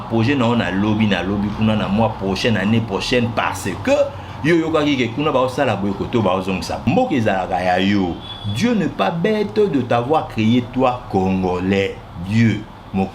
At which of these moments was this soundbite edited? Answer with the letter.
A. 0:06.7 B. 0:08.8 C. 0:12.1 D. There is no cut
A